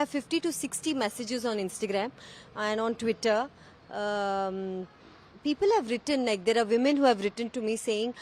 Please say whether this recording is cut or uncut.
uncut